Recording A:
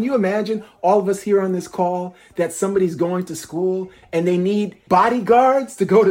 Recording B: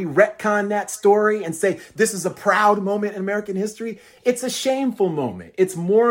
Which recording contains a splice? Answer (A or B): A